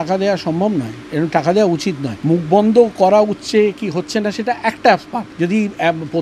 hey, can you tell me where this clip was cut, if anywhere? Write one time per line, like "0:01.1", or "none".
0:02.1
0:05.2